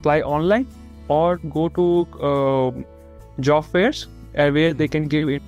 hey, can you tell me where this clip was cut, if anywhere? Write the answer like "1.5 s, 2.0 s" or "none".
none